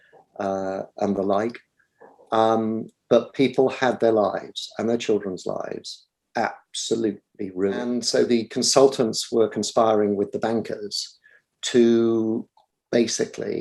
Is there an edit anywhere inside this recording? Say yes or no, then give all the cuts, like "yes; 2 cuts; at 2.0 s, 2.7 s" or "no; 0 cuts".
yes; 1 cut; at 8.0 s